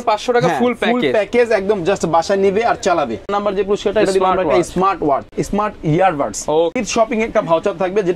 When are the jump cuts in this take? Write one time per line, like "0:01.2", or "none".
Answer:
0:03.3
0:05.4
0:06.8